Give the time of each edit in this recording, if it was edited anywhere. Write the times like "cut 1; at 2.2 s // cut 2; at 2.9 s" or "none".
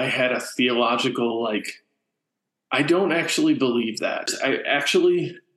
cut 1; at 4.3 s